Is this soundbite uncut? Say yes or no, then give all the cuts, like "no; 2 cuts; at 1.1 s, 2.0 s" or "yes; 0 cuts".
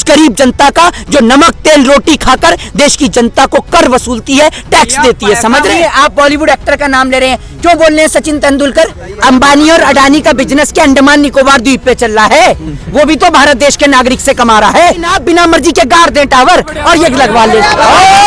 no; 3 cuts; at 5.7 s, 9.0 s, 15.1 s